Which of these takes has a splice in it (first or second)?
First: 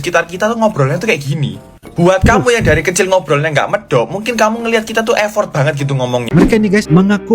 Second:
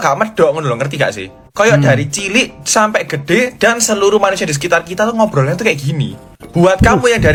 first